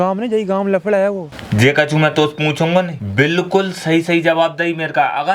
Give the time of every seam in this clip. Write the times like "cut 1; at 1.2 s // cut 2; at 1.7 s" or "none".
cut 1; at 1.3 s // cut 2; at 3.0 s